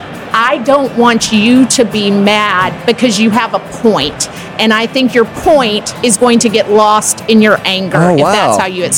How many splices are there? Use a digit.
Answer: 0